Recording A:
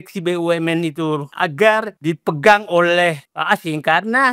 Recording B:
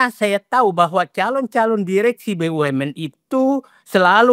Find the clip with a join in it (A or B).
A